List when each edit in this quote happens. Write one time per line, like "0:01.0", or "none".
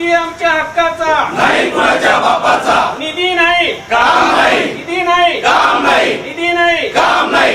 none